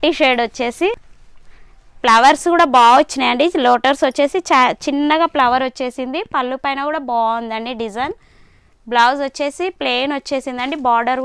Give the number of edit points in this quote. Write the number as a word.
zero